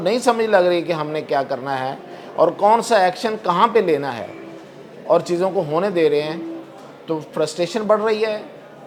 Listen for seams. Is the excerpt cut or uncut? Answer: uncut